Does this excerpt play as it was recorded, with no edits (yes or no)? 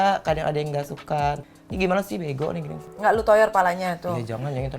no